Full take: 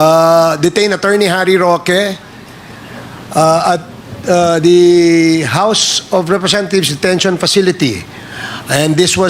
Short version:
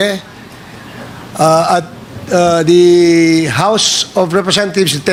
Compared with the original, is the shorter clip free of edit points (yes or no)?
yes